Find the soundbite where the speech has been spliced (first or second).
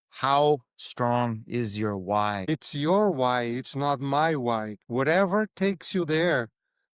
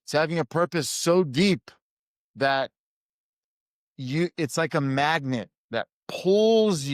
first